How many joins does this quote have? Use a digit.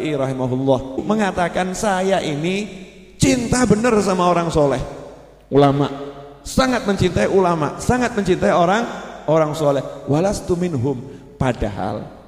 1